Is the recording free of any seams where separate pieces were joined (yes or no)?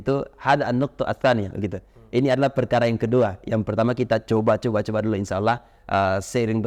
yes